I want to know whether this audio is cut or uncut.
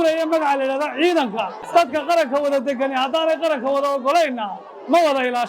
cut